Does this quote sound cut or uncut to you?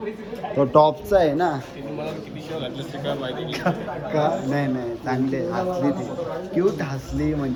uncut